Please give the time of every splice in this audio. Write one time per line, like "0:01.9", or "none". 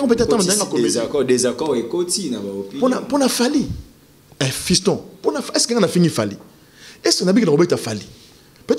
none